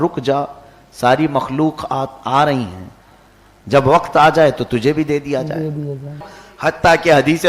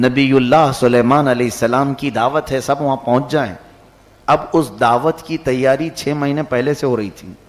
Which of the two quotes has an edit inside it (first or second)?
first